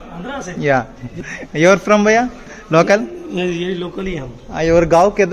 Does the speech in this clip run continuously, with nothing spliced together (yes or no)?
no